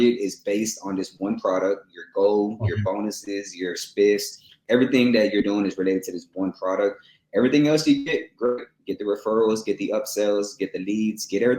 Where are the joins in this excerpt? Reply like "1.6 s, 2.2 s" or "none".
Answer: none